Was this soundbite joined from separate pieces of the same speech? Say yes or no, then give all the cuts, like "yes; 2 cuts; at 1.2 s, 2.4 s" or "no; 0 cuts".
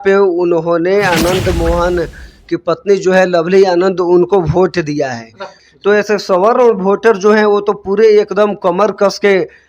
yes; 1 cut; at 5.6 s